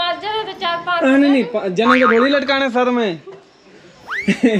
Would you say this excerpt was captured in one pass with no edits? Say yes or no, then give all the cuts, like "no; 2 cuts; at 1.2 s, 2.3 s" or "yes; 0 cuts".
yes; 0 cuts